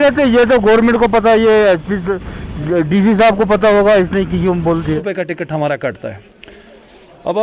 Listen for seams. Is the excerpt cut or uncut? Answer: cut